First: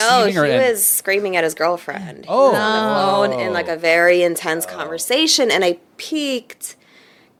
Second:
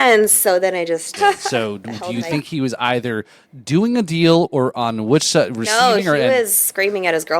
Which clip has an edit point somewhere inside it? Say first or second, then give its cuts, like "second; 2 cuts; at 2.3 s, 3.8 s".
second; 1 cut; at 1.2 s